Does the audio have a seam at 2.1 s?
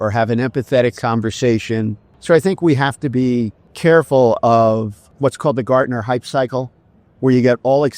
yes; 3 cuts; at 2.1 s, 3.6 s, 5.0 s

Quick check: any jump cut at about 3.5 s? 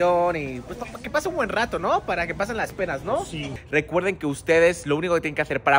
yes; 1 cut; at 3.5 s

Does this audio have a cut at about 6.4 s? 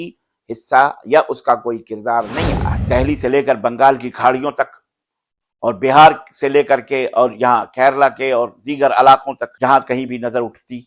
no; 2 cuts; at 2.7 s, 9.4 s

